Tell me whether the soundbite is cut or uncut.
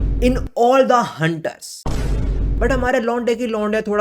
cut